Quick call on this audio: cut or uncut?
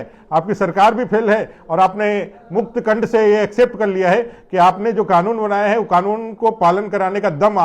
uncut